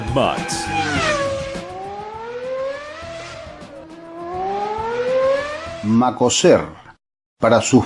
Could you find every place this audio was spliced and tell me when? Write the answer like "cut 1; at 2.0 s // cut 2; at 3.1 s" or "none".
cut 1; at 5.6 s